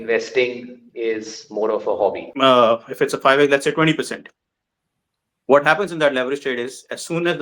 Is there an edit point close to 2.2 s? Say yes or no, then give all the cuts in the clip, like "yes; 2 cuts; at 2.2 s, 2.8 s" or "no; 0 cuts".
yes; 1 cut; at 2.2 s